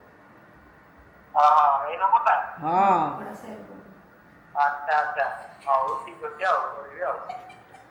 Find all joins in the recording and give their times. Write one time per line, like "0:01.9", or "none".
none

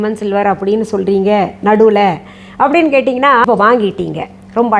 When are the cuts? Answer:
0:03.4

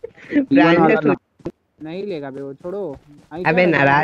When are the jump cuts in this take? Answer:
0:01.4

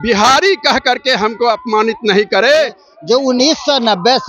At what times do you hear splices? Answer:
0:02.9

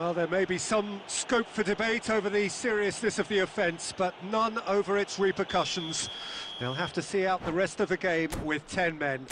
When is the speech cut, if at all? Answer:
none

